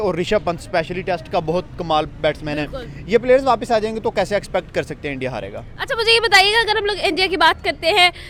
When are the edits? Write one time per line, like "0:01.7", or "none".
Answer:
none